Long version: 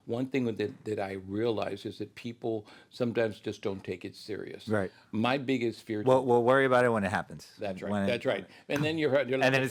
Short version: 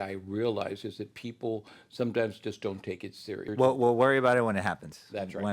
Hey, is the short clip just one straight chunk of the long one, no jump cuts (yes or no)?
no